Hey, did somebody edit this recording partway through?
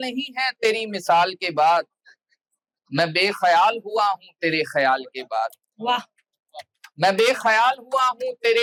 no; 0 cuts

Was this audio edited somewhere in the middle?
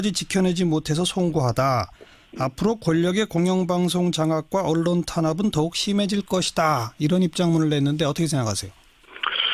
no; 0 cuts

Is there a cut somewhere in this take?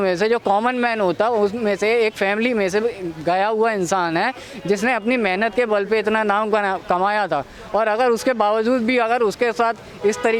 no; 0 cuts

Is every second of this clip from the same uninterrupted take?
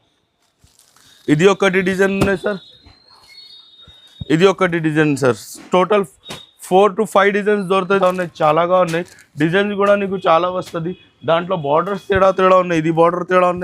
no; 1 cut; at 8.0 s

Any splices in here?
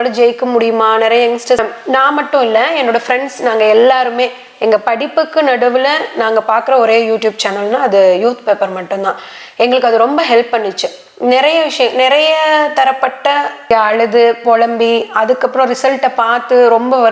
yes; 2 cuts; at 1.6 s, 13.6 s

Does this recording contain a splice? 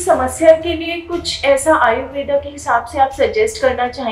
no; 0 cuts

